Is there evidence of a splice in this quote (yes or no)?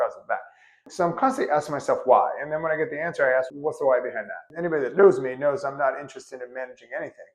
yes